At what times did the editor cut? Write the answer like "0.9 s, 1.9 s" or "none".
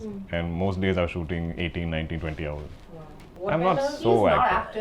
3.4 s